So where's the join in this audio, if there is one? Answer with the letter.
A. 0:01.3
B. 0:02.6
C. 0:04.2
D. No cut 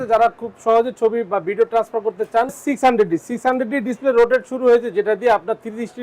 B